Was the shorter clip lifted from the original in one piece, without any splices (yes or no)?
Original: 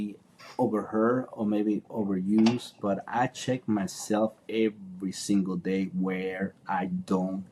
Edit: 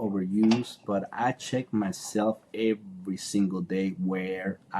yes